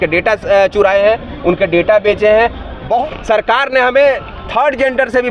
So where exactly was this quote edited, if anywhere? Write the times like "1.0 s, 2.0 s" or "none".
3.0 s